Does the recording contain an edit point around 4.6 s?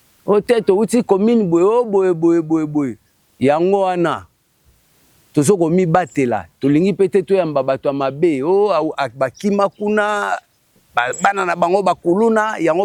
no; 0 cuts

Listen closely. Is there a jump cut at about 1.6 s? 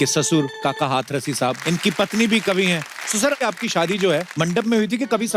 yes; 3 cuts; at 1.6 s, 3.4 s, 4.3 s

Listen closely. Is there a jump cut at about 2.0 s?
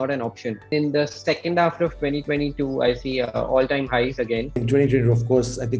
no; 2 cuts; at 0.7 s, 4.6 s

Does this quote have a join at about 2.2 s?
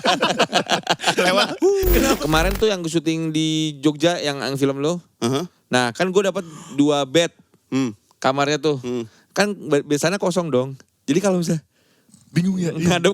yes; 1 cut; at 2.2 s

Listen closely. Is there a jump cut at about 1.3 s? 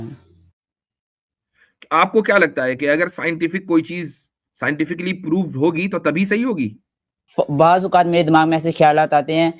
no; 1 cut; at 7.2 s

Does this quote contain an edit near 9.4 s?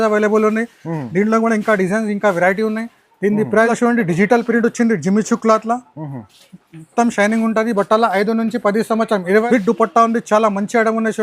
yes; 2 cuts; at 3.7 s, 9.4 s

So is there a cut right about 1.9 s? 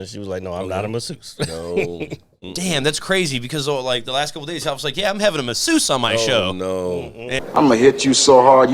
no; 1 cut; at 7.4 s

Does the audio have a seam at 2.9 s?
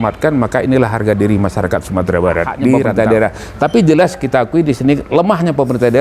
yes; 1 cut; at 2.9 s

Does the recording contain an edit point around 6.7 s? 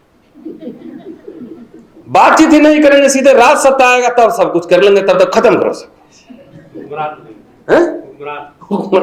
no; 0 cuts

